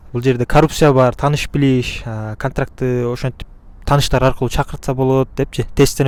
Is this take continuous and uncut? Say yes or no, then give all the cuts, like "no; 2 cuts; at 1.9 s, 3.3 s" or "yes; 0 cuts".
yes; 0 cuts